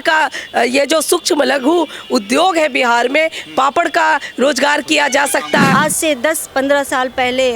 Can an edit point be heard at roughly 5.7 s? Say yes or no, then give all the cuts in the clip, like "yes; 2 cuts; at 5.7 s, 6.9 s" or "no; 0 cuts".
yes; 1 cut; at 5.7 s